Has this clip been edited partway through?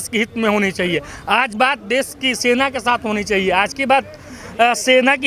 no; 0 cuts

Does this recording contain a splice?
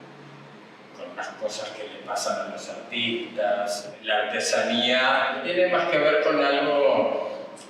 yes; 2 cuts; at 3.9 s, 5.4 s

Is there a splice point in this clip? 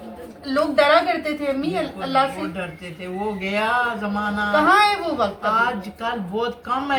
no; 0 cuts

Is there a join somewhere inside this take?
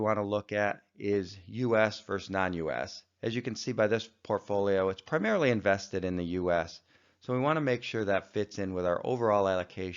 yes; 1 cut; at 1.8 s

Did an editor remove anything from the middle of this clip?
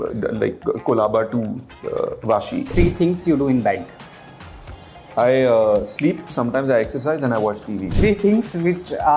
yes; 2 cuts; at 2.7 s, 7.8 s

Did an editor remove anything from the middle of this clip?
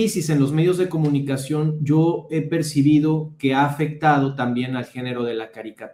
no; 0 cuts

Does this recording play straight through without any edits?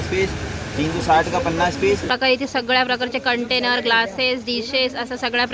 no; 1 cut; at 2.1 s

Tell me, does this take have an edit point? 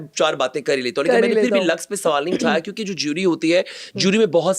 no; 0 cuts

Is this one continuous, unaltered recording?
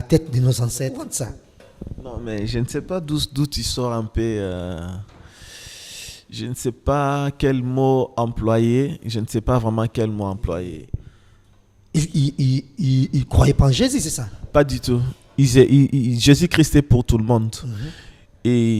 no; 2 cuts; at 1.1 s, 10.8 s

